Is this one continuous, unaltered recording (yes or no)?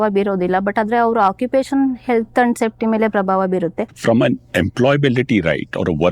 no